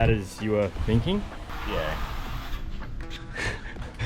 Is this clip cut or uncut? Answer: cut